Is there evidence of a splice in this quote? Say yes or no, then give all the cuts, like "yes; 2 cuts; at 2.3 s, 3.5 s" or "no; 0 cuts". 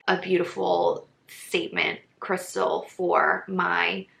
no; 0 cuts